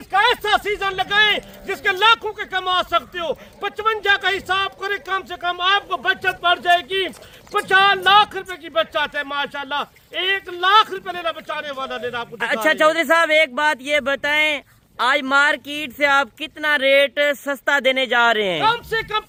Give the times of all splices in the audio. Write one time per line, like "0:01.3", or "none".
none